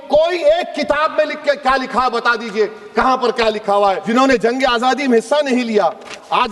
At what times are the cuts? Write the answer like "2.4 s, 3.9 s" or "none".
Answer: 4.0 s